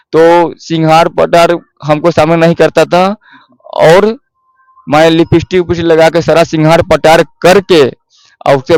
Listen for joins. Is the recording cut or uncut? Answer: uncut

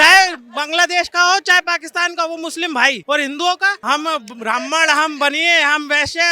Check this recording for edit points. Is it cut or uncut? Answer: cut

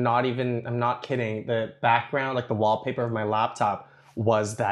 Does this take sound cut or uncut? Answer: uncut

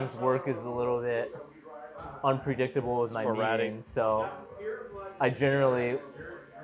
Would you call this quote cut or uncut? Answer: uncut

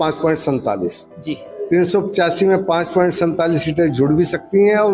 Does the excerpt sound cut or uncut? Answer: uncut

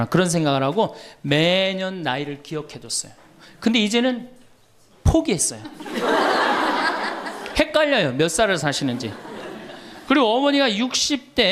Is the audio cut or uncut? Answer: uncut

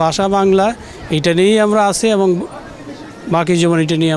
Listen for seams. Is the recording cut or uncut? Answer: uncut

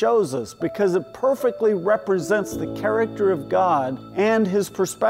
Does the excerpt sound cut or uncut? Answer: cut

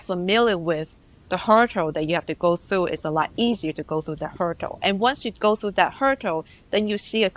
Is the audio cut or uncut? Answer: uncut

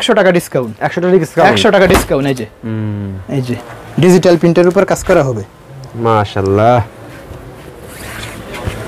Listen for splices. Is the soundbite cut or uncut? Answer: uncut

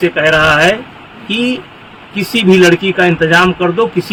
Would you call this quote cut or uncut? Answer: uncut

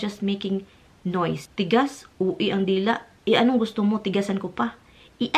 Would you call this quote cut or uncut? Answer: cut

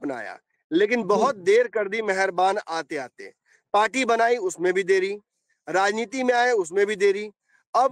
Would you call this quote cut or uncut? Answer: uncut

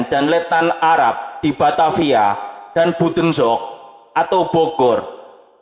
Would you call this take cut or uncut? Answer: uncut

